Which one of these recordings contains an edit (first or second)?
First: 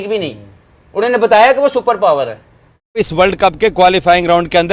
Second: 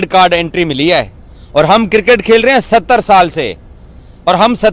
first